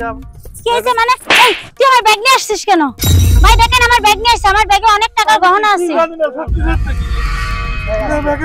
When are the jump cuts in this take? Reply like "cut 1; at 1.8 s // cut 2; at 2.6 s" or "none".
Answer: none